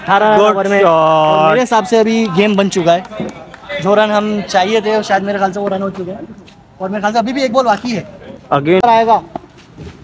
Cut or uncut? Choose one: cut